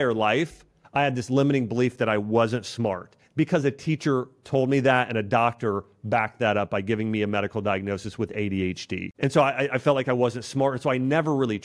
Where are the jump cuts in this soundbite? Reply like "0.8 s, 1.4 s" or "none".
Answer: none